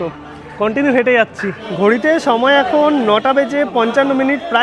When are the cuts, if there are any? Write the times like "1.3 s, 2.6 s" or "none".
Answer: 1.7 s